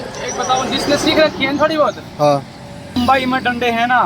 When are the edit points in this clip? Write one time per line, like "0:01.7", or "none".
0:03.0